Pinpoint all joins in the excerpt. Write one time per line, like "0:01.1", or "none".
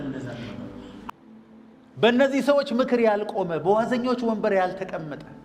0:01.0